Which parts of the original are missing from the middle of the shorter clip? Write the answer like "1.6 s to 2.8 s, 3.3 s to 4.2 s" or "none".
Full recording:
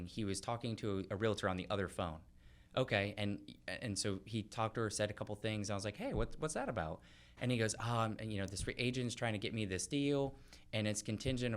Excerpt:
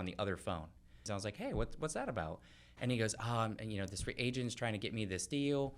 2.6 s to 5.6 s